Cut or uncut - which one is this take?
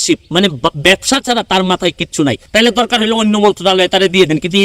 cut